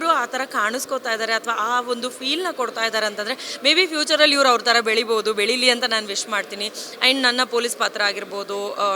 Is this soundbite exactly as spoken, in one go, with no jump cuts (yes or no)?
yes